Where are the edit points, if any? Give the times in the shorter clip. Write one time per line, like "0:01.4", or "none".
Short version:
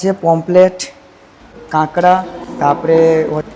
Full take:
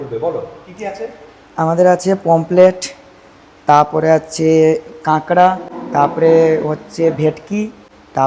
0:01.5